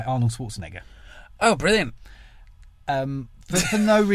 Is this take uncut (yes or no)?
yes